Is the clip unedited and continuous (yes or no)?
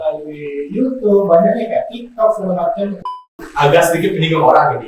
no